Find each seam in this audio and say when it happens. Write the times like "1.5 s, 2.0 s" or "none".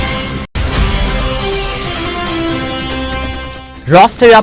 3.2 s